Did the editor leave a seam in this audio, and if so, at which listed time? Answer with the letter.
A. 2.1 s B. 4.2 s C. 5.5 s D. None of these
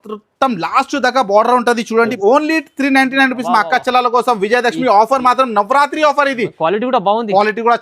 A